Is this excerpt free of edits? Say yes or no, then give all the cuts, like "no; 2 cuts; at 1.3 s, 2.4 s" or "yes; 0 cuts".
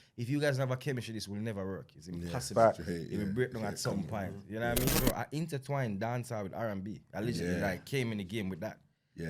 no; 1 cut; at 5.0 s